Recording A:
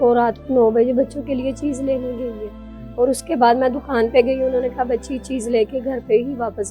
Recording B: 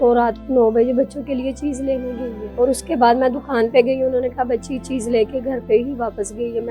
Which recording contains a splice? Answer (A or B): B